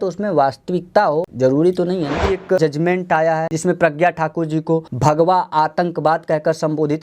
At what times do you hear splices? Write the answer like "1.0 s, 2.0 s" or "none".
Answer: 1.3 s, 2.6 s, 3.5 s, 4.9 s